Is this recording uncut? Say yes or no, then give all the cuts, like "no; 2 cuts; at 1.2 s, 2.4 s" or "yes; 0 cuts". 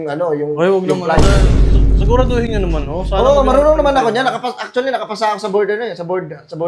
yes; 0 cuts